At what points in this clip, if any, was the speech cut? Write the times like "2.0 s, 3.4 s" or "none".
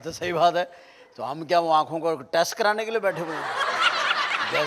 none

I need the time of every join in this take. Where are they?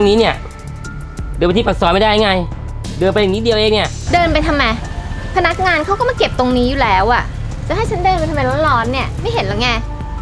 none

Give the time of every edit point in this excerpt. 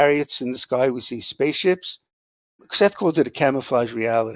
2.7 s

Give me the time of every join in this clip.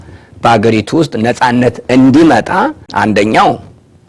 2.8 s

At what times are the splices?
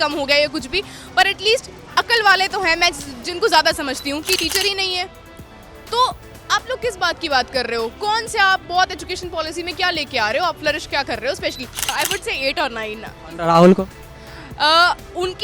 4.4 s, 11.8 s

